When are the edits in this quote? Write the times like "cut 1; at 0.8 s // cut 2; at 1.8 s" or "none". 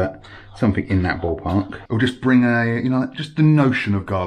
cut 1; at 1.8 s